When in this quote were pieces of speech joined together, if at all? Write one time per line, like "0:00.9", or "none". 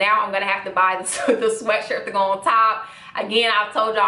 none